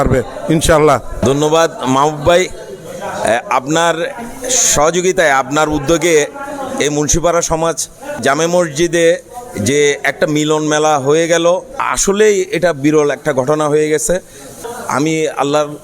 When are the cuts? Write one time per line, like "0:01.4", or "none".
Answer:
0:01.2
0:11.8